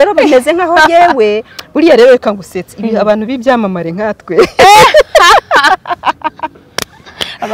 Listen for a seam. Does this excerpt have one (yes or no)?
yes